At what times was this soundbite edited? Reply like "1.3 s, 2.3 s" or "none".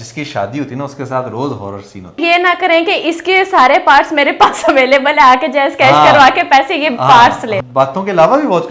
2.2 s, 7.6 s